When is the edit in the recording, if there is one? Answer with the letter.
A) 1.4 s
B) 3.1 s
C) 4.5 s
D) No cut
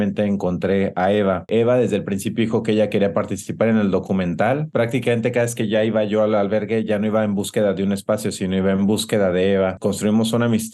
A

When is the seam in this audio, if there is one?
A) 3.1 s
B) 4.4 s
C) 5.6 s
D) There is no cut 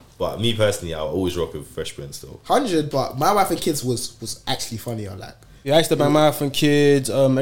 D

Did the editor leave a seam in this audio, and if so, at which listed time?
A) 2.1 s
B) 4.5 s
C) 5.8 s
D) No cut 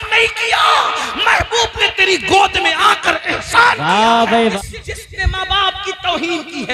B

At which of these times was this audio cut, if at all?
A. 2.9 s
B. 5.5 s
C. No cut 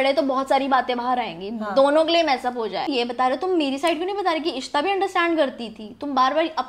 A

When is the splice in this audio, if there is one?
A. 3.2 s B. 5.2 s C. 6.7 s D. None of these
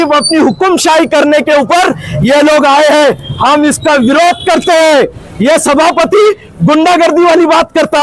B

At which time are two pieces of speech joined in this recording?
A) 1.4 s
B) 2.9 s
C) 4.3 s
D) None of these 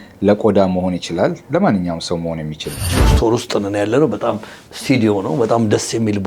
B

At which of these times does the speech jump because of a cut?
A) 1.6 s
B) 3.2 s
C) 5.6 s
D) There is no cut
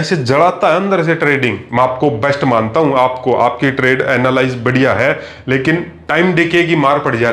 A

